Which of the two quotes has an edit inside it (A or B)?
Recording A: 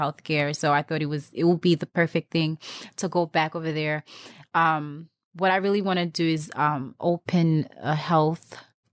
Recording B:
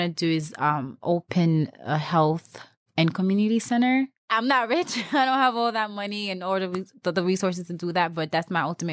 B